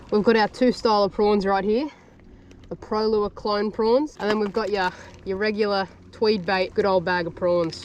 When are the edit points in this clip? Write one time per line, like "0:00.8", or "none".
0:04.1
0:06.7